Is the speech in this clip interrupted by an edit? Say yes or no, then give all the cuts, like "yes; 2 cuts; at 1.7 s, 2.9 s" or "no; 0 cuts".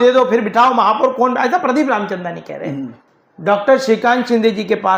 yes; 1 cut; at 3.1 s